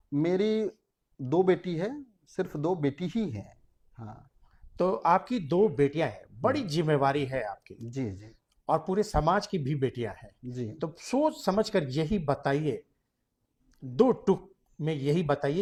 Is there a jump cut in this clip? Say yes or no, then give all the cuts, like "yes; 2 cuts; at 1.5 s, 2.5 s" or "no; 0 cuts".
no; 0 cuts